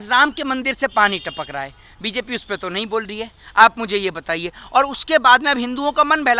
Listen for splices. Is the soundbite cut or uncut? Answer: uncut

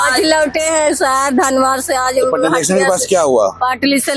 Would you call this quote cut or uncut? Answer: uncut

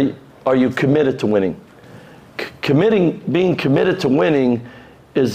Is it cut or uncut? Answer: uncut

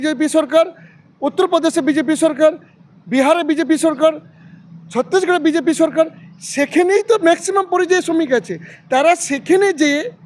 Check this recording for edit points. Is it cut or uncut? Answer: uncut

